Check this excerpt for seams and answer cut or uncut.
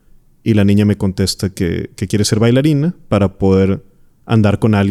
uncut